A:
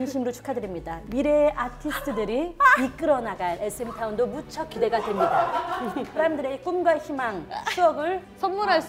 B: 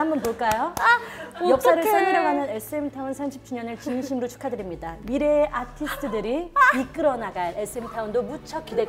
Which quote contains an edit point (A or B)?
A